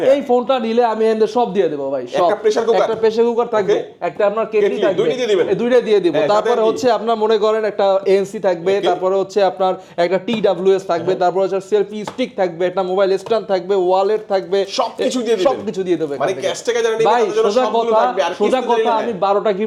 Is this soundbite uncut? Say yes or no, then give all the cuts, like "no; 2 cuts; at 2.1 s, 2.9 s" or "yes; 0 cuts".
yes; 0 cuts